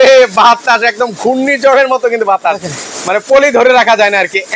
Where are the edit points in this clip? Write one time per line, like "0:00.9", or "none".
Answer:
none